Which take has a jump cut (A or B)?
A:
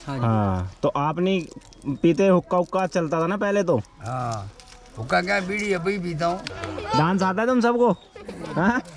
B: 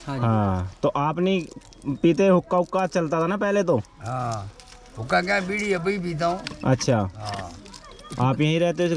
A